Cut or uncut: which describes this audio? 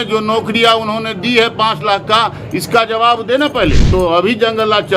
cut